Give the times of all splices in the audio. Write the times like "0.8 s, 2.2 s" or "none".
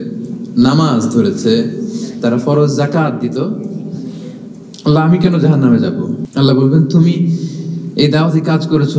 6.2 s